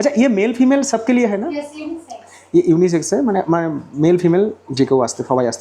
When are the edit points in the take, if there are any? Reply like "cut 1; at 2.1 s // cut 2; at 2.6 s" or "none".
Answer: none